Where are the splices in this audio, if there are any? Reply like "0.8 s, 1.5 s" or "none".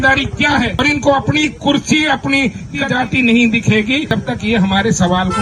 0.7 s, 2.8 s, 4.1 s